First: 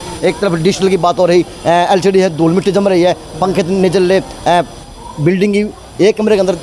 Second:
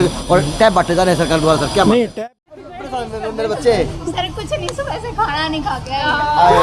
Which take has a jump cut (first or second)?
second